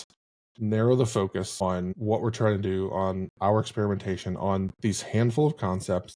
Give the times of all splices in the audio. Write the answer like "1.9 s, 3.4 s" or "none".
1.9 s